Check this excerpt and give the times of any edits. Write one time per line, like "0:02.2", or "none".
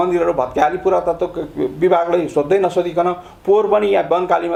none